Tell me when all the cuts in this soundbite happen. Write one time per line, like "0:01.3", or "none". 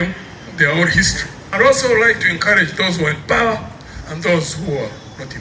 0:01.3